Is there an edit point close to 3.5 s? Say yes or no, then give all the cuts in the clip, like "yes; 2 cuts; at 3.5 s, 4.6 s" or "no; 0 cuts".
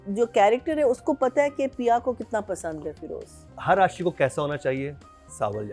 yes; 1 cut; at 3.5 s